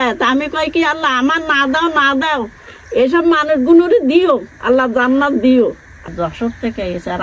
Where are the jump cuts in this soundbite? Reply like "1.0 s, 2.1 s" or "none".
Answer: 5.9 s